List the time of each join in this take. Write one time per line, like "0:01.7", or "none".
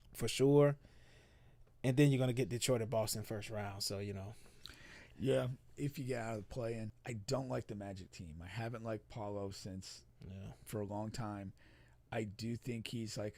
0:07.0